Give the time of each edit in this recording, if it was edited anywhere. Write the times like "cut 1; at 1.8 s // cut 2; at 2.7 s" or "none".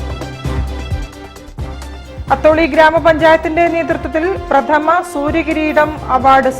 none